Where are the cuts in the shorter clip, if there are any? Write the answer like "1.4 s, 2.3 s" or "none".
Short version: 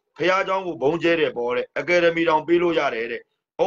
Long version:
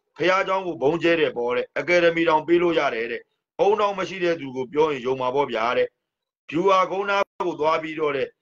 none